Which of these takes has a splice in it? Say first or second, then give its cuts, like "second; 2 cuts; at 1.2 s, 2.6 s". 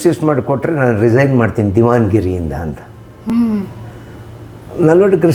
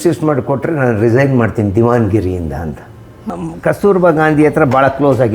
second; 1 cut; at 3.2 s